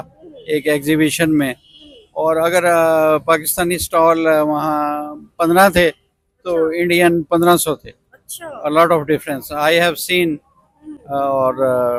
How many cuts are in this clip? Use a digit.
0